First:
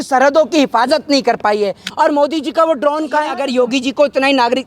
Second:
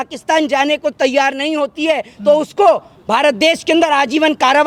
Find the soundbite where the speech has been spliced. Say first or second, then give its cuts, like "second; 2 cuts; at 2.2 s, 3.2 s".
first; 2 cuts; at 1.9 s, 3.4 s